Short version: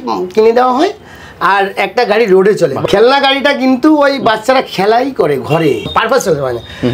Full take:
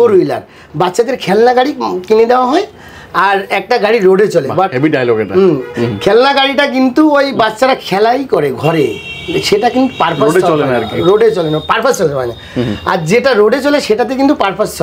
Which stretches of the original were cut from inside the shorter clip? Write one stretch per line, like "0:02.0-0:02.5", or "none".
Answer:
0:04.5-0:05.9
0:09.0-0:11.6